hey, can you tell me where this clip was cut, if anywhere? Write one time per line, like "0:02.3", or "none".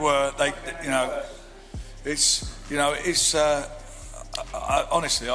none